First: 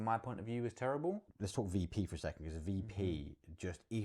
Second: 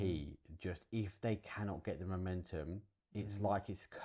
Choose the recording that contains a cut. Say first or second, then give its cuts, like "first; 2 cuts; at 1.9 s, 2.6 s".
first; 1 cut; at 1.4 s